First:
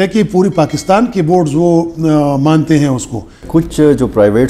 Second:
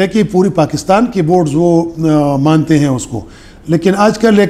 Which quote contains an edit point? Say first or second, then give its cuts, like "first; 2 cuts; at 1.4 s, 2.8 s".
first; 1 cut; at 3.3 s